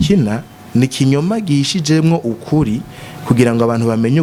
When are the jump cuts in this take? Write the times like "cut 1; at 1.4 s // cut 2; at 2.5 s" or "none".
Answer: none

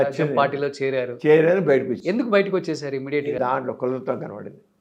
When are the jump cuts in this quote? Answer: cut 1; at 3.4 s

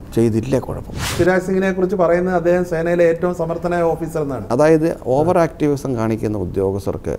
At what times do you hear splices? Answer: cut 1; at 1.1 s // cut 2; at 4.4 s

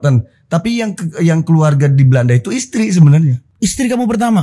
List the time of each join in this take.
cut 1; at 3.4 s

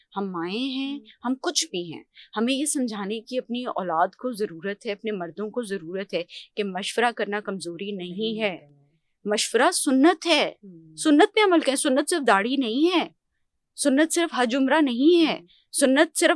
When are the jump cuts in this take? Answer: none

